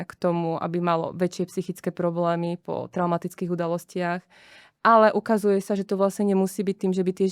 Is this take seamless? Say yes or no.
yes